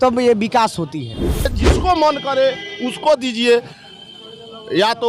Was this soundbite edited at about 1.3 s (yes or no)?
yes